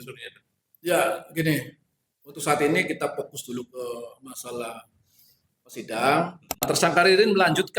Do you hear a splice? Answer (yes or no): yes